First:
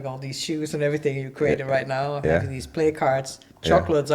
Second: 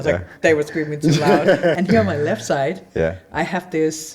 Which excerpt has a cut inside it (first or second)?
second